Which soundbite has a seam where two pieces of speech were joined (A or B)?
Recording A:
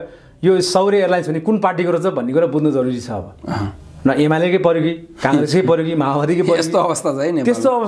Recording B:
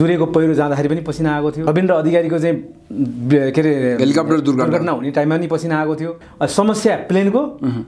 B